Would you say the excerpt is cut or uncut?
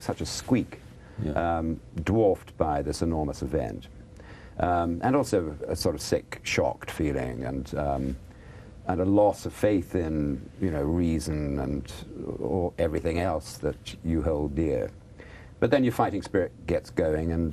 uncut